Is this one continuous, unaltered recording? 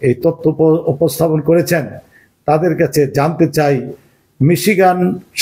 yes; 0 cuts

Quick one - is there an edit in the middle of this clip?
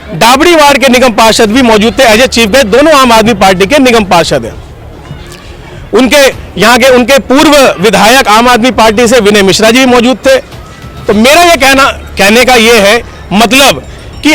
no; 0 cuts

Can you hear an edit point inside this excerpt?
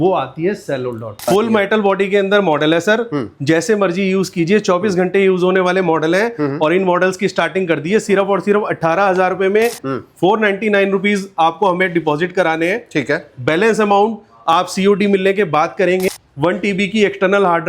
yes; 3 cuts; at 1.3 s, 9.9 s, 16.0 s

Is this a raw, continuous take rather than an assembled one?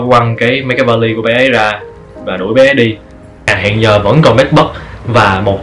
no; 1 cut; at 3.5 s

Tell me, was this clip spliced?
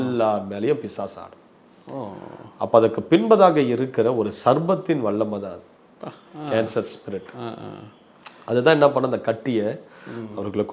no; 0 cuts

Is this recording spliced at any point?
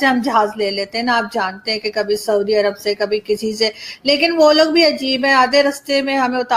no; 0 cuts

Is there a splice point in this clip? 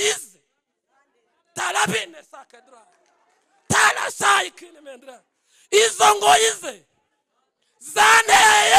no; 0 cuts

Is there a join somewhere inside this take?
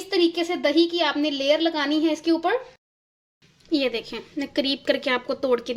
yes; 1 cut; at 2.9 s

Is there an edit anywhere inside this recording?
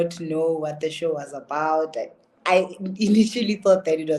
no; 0 cuts

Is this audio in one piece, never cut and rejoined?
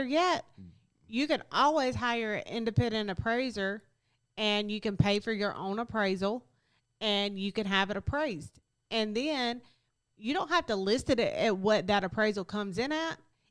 yes; 0 cuts

